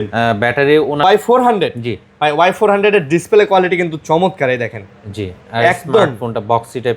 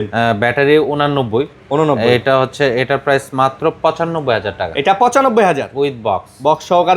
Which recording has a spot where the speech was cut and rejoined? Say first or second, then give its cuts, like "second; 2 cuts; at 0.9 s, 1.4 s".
first; 1 cut; at 1.0 s